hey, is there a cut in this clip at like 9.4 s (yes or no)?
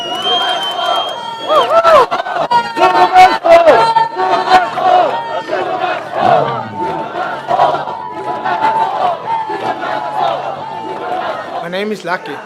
no